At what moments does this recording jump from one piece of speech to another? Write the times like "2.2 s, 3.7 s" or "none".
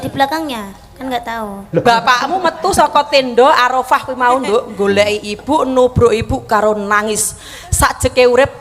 1.8 s

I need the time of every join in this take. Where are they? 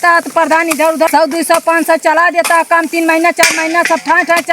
1.1 s

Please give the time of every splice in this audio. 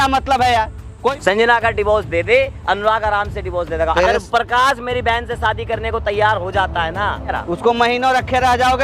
1.1 s, 3.9 s, 7.4 s

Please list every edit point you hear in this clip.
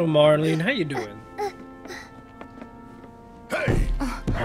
none

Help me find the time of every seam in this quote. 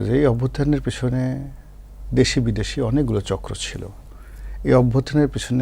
none

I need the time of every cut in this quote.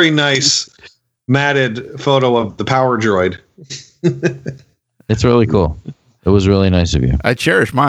none

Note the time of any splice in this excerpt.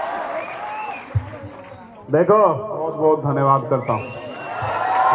2.9 s

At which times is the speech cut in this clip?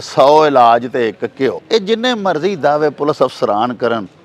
1.6 s

